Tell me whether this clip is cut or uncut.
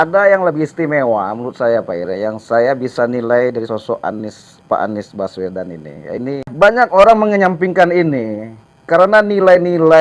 cut